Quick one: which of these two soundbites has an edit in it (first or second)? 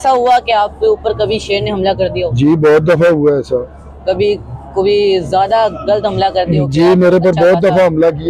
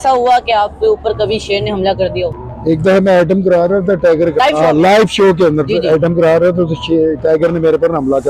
second